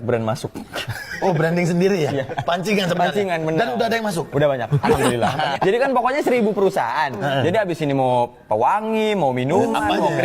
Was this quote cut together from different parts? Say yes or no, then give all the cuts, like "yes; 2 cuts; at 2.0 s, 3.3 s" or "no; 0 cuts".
yes; 1 cut; at 5.5 s